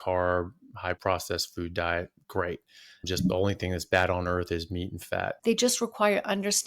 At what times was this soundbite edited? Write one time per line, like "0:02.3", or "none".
0:01.0
0:03.0
0:05.4